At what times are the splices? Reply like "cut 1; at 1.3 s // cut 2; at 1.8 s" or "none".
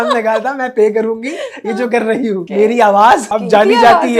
cut 1; at 2.5 s // cut 2; at 3.3 s